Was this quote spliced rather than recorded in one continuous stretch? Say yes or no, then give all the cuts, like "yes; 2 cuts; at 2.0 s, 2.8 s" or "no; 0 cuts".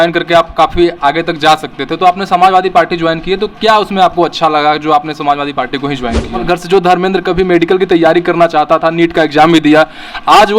yes; 1 cut; at 6.4 s